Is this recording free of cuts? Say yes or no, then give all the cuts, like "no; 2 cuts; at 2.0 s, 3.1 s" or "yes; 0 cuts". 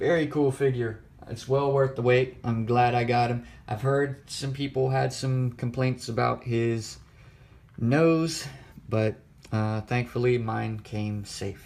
no; 1 cut; at 3.5 s